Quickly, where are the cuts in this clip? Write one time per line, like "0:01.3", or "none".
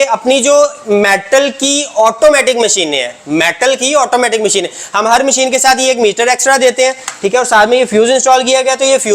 none